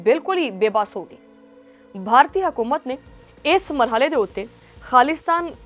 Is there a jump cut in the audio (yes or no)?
no